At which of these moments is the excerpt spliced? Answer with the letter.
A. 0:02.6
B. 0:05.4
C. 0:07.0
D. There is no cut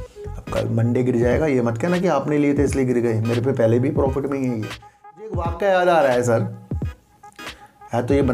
B